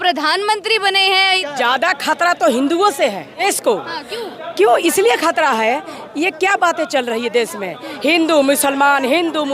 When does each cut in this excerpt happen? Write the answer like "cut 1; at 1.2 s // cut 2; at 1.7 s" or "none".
cut 1; at 1.4 s // cut 2; at 3.4 s